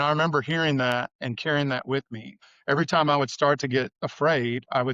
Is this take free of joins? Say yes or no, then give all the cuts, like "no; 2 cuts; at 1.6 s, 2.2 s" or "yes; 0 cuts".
no; 3 cuts; at 1.2 s, 2.4 s, 4.0 s